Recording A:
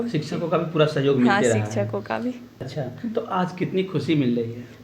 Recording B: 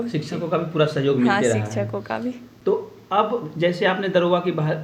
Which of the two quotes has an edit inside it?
A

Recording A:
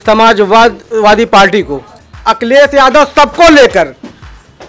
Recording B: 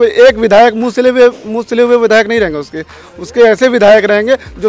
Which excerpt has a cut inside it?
A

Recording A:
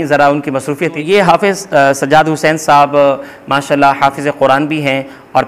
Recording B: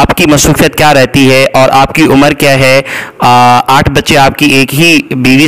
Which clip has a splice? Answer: A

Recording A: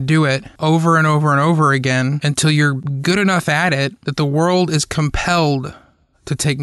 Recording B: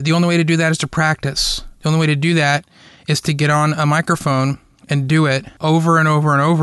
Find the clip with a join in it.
A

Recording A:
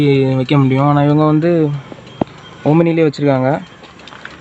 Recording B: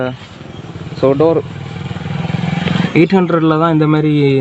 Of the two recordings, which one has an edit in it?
B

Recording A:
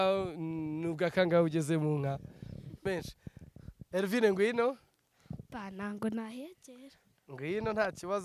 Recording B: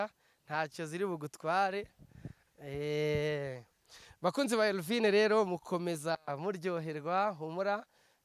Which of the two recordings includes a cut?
A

